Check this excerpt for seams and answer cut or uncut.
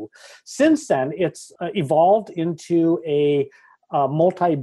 uncut